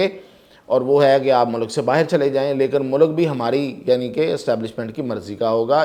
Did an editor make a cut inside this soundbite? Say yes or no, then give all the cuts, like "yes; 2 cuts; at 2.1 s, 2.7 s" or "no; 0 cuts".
no; 0 cuts